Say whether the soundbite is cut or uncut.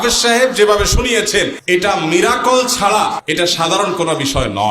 cut